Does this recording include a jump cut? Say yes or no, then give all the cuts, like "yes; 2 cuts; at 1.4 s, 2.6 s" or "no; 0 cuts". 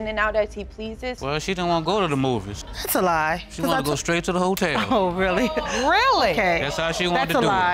yes; 1 cut; at 1.1 s